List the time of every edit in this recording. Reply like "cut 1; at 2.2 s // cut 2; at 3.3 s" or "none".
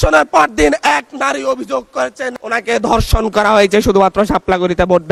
none